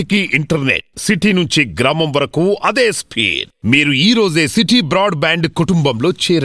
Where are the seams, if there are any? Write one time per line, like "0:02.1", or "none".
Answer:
none